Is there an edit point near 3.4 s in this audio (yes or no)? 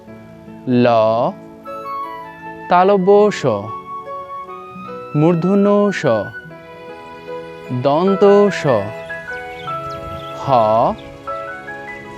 no